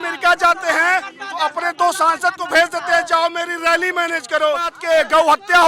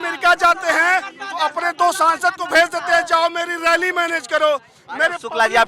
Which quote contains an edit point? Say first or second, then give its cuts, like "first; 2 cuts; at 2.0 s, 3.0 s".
first; 1 cut; at 4.8 s